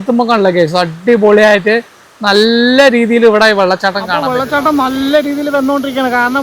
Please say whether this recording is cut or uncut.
cut